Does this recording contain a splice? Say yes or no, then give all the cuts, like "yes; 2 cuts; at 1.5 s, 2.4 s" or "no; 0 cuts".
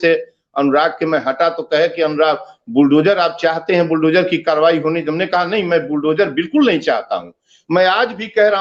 no; 0 cuts